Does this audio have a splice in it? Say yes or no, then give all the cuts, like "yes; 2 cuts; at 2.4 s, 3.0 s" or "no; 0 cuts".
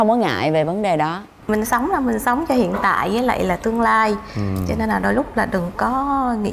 yes; 1 cut; at 1.3 s